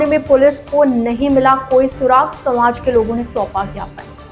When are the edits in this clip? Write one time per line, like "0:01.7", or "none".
none